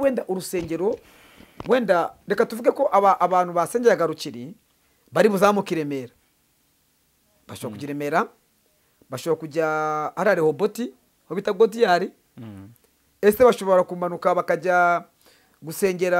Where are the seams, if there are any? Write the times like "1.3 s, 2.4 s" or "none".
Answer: none